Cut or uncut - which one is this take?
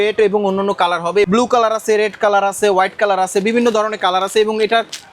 cut